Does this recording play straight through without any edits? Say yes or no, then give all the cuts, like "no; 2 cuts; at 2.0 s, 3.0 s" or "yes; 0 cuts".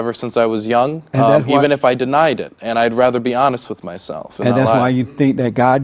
no; 1 cut; at 1.0 s